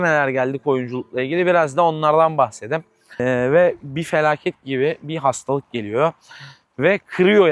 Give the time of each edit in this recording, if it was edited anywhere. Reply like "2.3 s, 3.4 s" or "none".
3.2 s